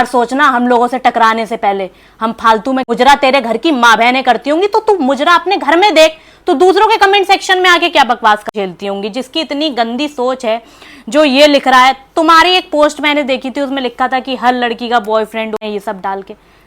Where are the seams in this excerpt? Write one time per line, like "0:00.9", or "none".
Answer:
0:02.8
0:08.5
0:15.6

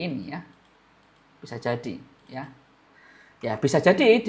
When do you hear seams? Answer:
none

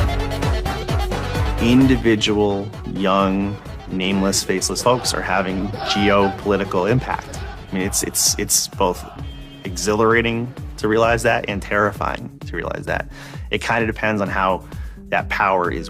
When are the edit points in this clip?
0:12.5

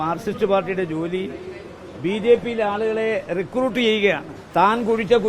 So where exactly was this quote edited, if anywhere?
0:04.3

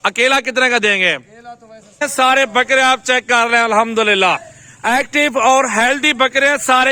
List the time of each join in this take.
0:02.0

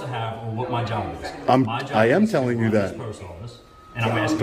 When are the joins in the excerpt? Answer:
none

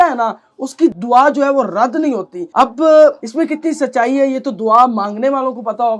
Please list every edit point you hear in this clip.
none

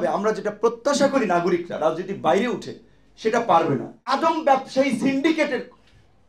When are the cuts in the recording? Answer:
0:04.2

